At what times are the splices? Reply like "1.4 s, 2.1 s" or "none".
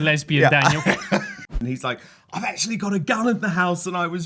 1.6 s